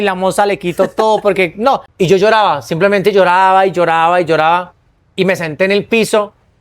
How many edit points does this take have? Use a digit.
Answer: 1